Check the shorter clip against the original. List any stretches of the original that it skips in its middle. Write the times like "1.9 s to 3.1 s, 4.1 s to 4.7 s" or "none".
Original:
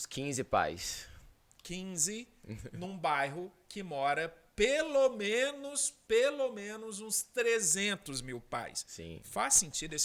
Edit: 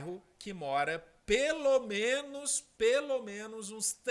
none